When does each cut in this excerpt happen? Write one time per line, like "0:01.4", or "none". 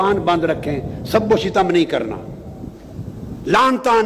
none